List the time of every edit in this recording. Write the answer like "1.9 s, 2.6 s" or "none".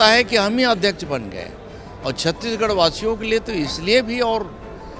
none